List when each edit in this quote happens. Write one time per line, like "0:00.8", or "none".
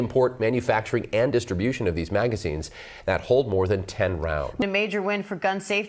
0:04.7